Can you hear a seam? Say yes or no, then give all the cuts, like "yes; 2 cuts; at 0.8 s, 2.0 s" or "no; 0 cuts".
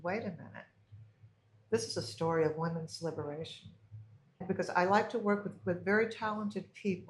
yes; 1 cut; at 4.4 s